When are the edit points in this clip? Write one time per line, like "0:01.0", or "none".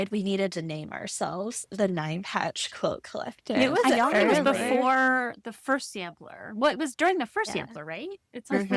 none